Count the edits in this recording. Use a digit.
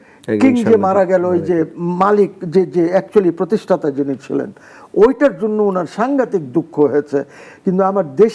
0